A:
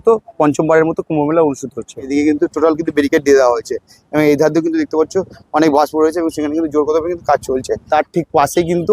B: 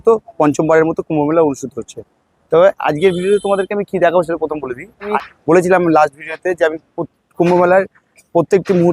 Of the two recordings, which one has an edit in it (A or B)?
A